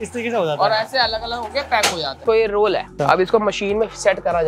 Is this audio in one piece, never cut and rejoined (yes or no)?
no